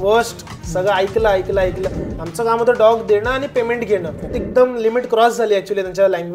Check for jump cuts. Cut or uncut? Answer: cut